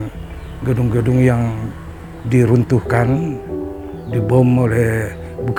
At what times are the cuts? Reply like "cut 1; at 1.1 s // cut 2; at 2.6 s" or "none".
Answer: none